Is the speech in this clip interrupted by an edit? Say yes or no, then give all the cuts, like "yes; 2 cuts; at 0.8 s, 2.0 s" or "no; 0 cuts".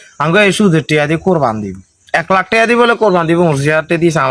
no; 0 cuts